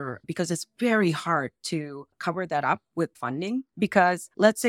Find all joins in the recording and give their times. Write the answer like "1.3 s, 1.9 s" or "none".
3.7 s